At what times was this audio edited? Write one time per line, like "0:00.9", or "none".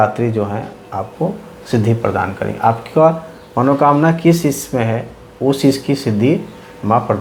none

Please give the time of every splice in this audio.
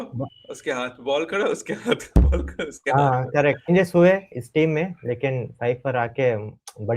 0:03.7

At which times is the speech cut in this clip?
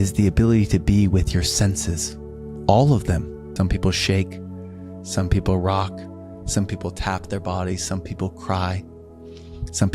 0:03.5

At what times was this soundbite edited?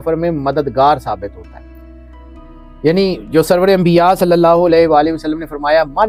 none

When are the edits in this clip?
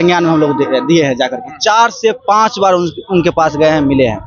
none

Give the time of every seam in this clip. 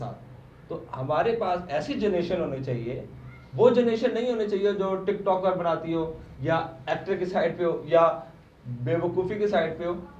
none

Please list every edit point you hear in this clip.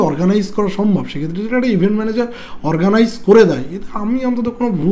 none

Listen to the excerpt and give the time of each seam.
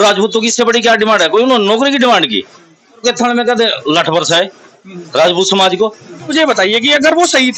0:03.0
0:06.3

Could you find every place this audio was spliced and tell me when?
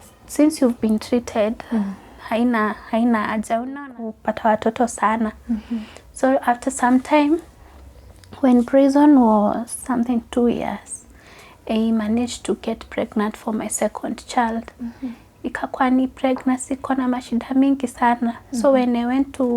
0:03.8

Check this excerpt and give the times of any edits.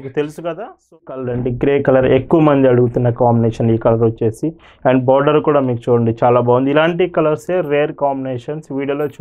0:01.1

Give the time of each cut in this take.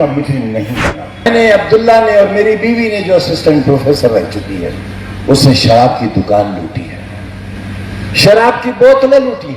0:01.3

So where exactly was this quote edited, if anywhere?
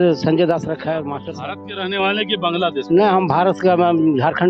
0:01.3

